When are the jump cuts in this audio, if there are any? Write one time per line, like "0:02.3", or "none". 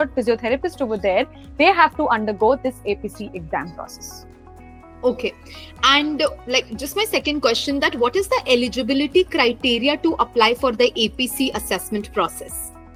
none